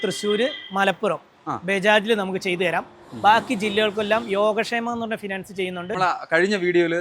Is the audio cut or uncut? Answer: cut